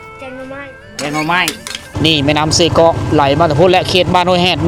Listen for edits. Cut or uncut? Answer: cut